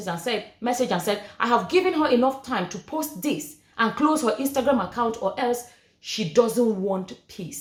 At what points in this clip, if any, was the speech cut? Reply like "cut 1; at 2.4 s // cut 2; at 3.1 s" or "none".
none